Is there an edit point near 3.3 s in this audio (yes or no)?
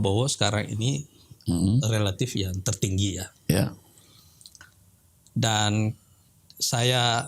no